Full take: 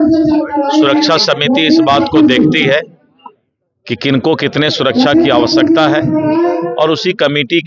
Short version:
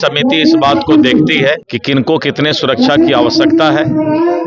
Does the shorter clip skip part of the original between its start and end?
yes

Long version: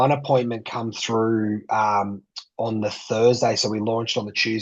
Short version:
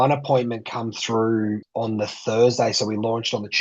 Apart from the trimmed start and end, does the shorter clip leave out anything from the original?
yes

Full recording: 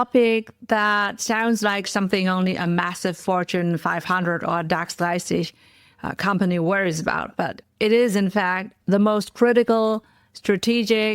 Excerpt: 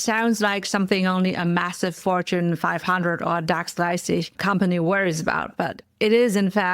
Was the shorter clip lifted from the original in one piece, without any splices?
no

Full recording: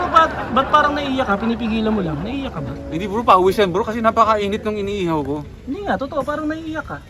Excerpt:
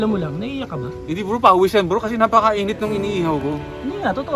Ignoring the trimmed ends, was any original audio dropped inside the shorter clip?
no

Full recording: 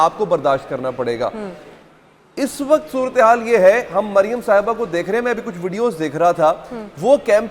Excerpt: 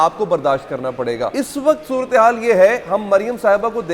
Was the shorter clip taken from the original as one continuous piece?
no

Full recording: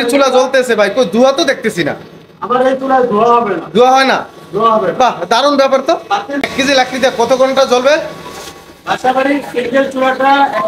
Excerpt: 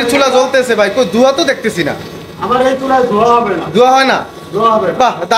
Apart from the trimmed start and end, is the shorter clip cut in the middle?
no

